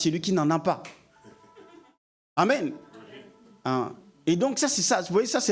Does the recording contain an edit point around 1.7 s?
no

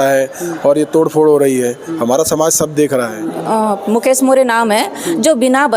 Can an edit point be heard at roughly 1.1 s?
no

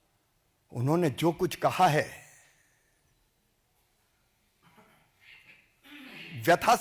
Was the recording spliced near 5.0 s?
no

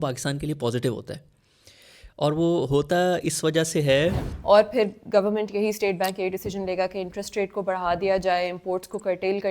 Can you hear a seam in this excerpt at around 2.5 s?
no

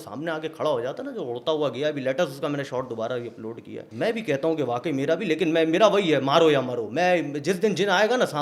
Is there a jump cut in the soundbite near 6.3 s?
no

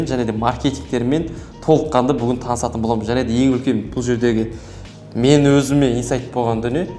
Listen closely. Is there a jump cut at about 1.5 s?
no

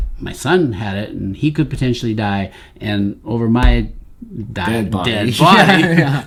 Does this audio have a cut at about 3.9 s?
no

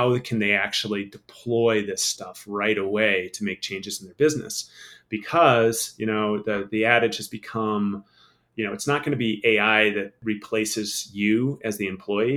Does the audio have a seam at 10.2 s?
yes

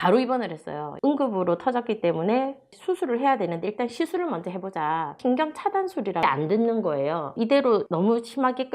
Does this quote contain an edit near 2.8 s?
no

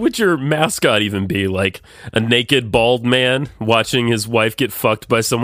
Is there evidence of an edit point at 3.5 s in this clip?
no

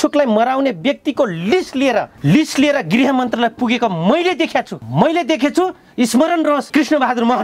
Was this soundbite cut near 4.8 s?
yes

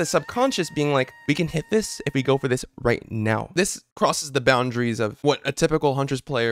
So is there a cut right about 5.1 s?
no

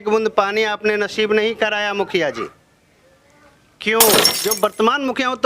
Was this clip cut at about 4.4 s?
yes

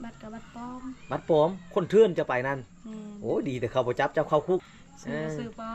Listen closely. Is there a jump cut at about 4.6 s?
yes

